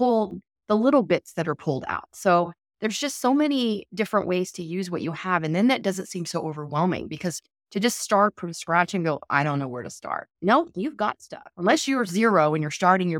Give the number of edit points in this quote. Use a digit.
0